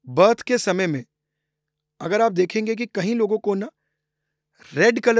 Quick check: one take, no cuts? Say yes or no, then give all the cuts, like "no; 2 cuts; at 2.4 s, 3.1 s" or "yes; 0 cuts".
yes; 0 cuts